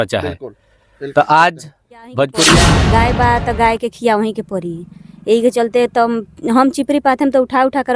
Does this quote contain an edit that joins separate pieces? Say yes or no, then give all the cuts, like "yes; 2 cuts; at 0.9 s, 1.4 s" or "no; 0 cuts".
yes; 1 cut; at 2.7 s